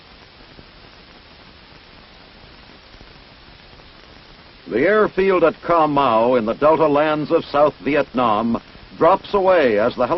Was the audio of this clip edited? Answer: no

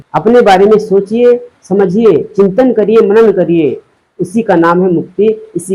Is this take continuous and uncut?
yes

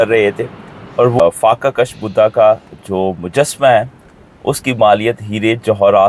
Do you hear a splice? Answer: yes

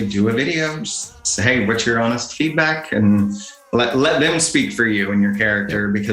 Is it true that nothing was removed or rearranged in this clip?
yes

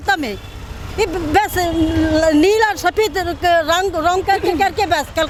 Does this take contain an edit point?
no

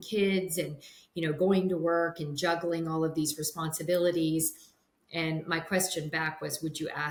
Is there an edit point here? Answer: no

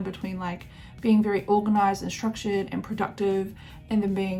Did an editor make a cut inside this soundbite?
no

